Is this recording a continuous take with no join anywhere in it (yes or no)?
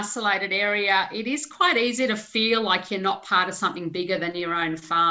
yes